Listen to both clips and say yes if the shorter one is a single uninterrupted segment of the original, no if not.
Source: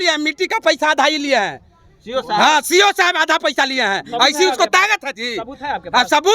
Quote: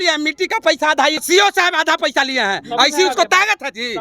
no